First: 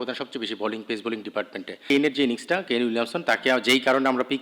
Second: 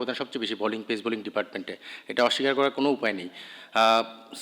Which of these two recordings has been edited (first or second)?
first